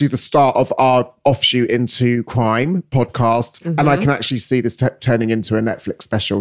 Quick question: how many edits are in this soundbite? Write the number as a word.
zero